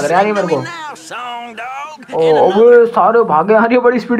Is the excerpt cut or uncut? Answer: uncut